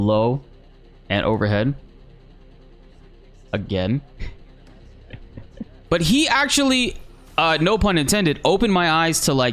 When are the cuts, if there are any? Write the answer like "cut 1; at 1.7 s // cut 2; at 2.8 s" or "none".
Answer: cut 1; at 1.8 s // cut 2; at 3.5 s // cut 3; at 5.8 s